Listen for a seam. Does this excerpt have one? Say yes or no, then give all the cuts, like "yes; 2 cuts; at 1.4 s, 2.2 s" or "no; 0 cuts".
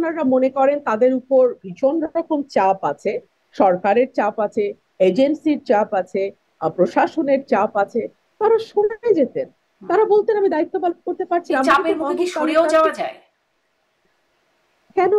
no; 0 cuts